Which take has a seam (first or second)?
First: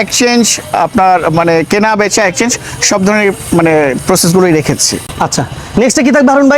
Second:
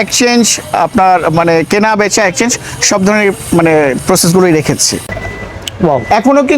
second